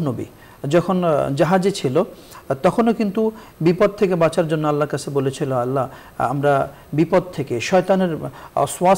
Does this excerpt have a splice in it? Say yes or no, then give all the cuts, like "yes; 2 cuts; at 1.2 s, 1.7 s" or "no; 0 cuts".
no; 0 cuts